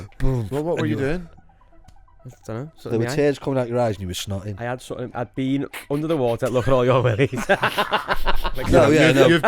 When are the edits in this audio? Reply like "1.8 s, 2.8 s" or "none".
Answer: 8.6 s